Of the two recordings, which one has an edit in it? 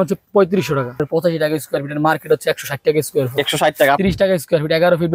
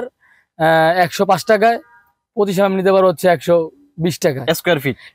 first; 2 cuts; at 1.0 s, 4.0 s

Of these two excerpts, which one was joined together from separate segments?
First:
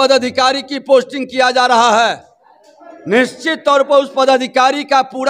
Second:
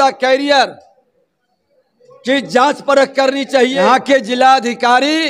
second; 1 cut; at 3.8 s

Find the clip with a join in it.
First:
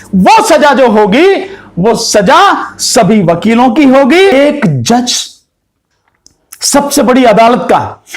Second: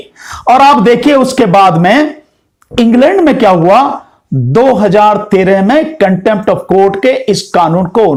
first; 1 cut; at 4.3 s

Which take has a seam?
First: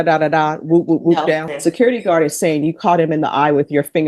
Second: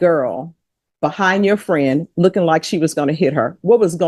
first; 1 cut; at 1.5 s

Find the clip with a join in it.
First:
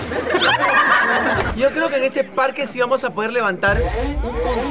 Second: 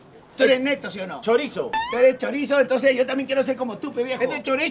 first; 1 cut; at 1.5 s

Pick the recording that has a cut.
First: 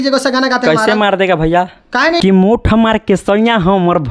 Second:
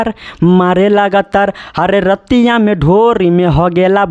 first; 1 cut; at 2.2 s

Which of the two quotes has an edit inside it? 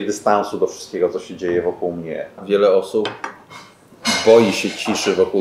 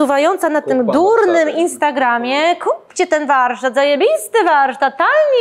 first; 1 cut; at 2.4 s

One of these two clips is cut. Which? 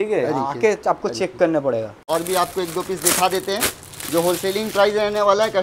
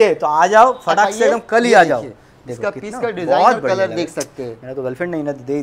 first; 1 cut; at 2.0 s

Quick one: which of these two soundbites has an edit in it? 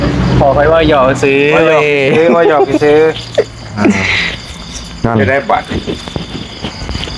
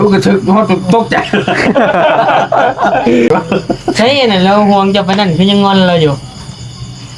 second; 1 cut; at 3.3 s

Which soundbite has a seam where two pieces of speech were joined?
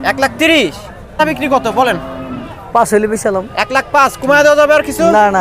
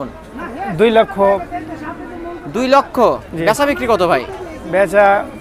first; 1 cut; at 1.2 s

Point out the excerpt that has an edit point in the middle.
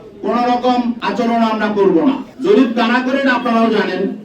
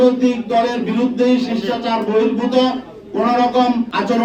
first; 1 cut; at 2.3 s

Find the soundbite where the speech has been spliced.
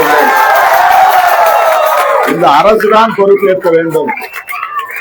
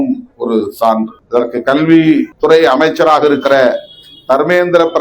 second; 2 cuts; at 1.2 s, 2.3 s

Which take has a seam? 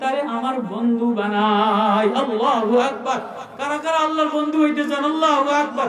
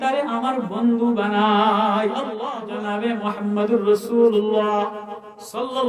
second; 1 cut; at 2.3 s

